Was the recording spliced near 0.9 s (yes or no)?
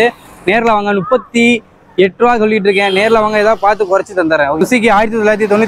no